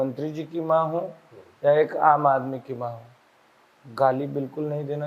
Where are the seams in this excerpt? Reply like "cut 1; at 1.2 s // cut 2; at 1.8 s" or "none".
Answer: none

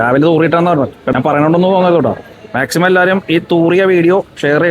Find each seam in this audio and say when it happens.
cut 1; at 1.0 s

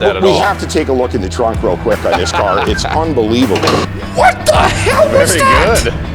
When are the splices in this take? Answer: cut 1; at 4.0 s

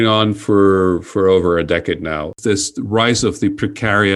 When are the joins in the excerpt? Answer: cut 1; at 2.4 s

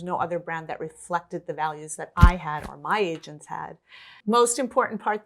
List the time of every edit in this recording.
cut 1; at 4.2 s

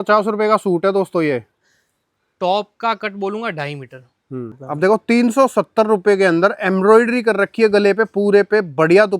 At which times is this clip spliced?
cut 1; at 4.6 s

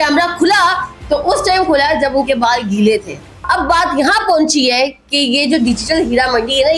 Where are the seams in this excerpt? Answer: cut 1; at 3.4 s

